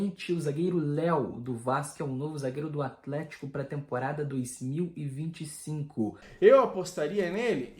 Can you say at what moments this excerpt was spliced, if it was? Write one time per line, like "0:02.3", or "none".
0:06.2